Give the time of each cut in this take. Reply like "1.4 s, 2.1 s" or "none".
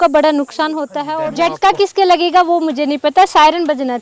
0.9 s